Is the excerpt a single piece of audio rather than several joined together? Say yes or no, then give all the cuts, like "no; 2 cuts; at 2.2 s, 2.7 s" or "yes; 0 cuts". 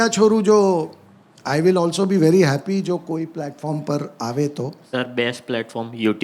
yes; 0 cuts